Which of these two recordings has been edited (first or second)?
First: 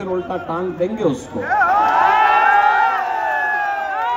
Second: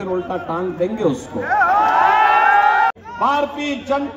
second